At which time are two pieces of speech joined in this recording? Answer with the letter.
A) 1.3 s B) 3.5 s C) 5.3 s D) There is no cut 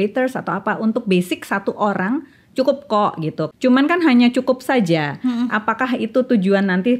B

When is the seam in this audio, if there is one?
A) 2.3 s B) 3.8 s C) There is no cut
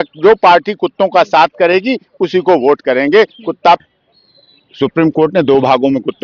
B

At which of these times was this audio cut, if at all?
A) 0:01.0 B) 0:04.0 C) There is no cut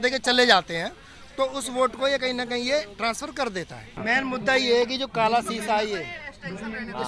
B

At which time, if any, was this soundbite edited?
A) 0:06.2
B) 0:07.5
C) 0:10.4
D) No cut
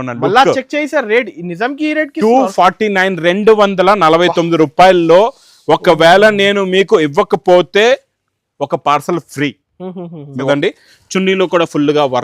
C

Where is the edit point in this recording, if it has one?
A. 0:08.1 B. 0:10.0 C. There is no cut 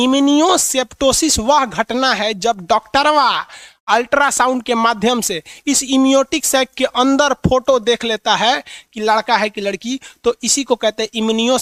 C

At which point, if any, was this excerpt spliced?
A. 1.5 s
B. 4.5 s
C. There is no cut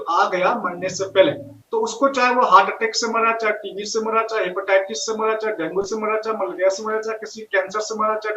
A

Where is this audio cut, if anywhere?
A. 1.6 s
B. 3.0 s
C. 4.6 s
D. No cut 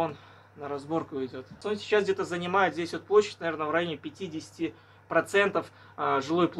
A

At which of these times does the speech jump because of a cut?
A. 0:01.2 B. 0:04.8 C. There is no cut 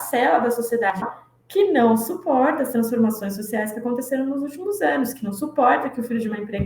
A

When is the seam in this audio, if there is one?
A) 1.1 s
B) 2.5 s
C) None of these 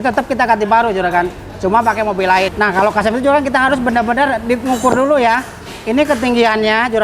B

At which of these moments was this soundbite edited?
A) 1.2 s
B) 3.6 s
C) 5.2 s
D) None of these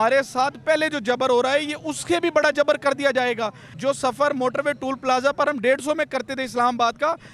B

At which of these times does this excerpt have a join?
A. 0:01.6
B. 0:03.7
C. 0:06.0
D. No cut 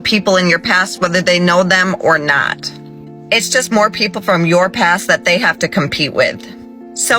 B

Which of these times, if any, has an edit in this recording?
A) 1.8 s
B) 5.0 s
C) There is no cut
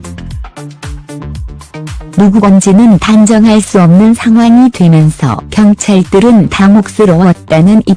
B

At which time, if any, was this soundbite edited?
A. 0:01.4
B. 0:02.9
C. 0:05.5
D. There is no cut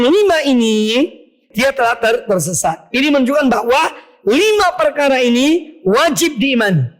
A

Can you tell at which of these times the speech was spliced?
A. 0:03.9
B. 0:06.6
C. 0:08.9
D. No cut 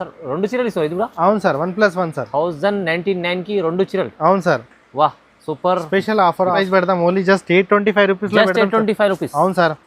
B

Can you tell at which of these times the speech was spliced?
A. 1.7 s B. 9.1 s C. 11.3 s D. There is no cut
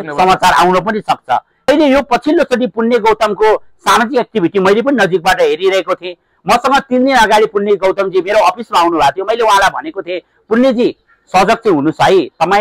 A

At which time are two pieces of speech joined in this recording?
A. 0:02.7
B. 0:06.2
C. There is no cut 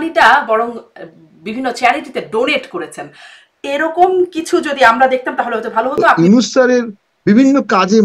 B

